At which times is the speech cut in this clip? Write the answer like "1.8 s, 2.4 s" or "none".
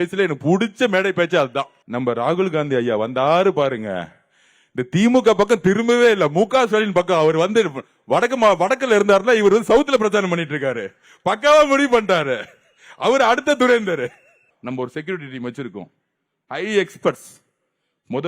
1.8 s, 14.5 s

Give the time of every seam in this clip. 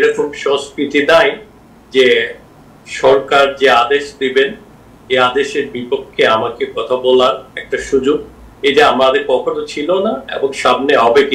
none

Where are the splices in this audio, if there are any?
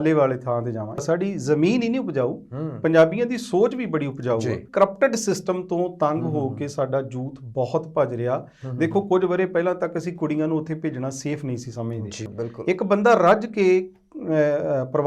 1.0 s, 4.6 s, 12.2 s

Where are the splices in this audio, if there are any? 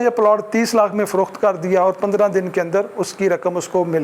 none

